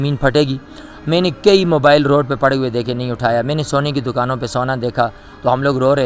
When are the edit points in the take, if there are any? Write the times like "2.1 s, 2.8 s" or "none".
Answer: none